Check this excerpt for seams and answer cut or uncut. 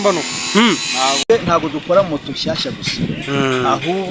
cut